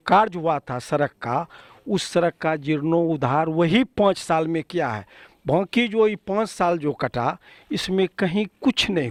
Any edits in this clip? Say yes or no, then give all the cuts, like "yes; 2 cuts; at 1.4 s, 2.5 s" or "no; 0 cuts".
no; 0 cuts